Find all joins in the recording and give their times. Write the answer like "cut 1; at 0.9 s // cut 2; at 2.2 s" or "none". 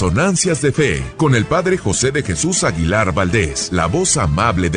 cut 1; at 1.0 s // cut 2; at 3.6 s